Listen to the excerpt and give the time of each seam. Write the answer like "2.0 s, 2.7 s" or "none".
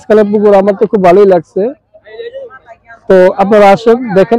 none